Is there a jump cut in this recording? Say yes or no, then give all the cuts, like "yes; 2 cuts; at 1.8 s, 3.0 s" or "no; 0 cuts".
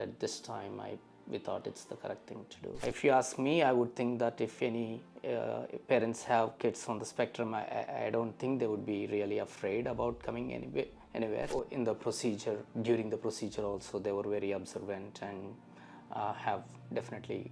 yes; 2 cuts; at 2.8 s, 11.5 s